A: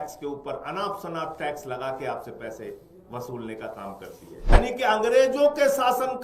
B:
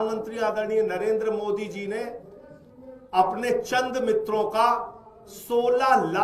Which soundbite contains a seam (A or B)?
A